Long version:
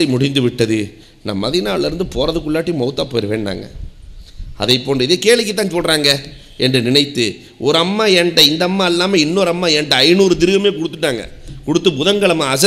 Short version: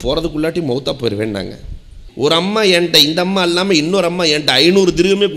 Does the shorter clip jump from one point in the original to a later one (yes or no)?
yes